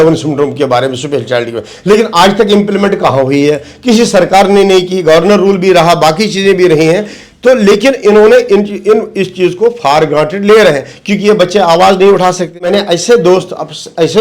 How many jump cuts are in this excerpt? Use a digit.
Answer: 1